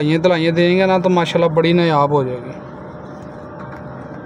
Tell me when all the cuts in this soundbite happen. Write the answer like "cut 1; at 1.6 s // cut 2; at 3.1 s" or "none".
none